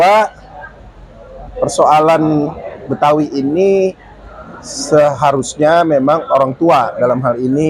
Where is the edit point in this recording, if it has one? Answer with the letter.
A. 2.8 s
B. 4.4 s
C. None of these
C